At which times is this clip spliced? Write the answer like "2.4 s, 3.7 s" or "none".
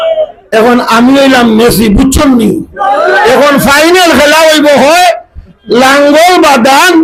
none

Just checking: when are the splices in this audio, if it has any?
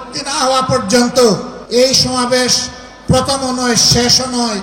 1.5 s

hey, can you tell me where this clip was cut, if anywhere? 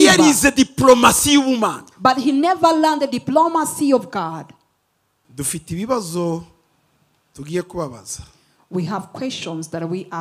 5.2 s

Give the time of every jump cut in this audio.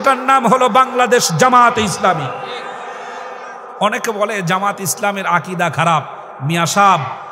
3.6 s

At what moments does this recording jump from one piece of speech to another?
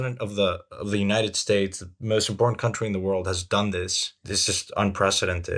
4.3 s

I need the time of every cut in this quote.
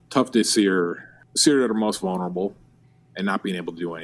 none

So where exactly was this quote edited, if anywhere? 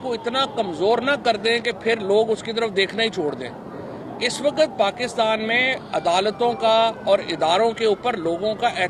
none

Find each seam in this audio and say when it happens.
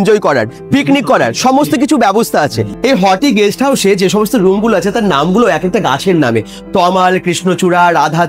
2.7 s

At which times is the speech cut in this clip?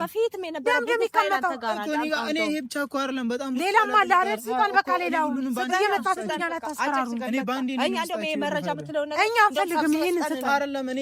none

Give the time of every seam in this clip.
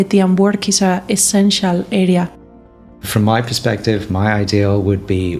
2.5 s

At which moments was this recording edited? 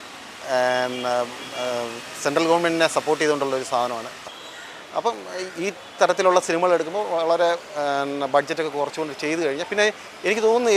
4.2 s

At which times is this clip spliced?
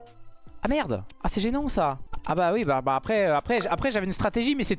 1.1 s, 2.1 s

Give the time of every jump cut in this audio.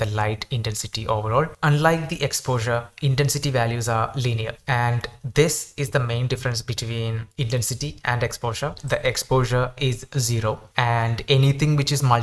1.5 s, 8.8 s

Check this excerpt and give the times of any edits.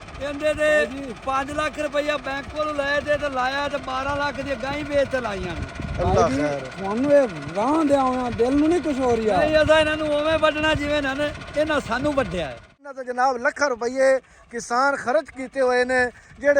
12.9 s

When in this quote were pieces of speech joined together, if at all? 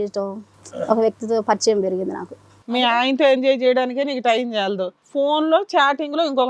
2.6 s, 5.0 s

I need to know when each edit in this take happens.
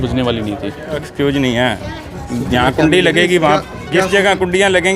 1.0 s

